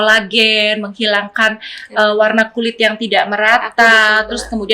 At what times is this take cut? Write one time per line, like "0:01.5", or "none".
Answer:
none